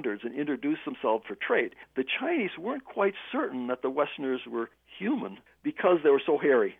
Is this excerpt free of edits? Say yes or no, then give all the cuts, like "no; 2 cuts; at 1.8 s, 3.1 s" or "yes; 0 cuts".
no; 2 cuts; at 1.7 s, 5.0 s